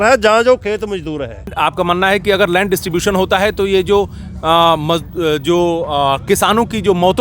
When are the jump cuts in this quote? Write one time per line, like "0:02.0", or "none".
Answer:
0:01.4